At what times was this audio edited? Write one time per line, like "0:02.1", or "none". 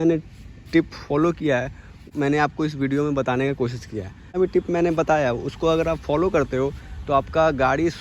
0:02.0
0:04.4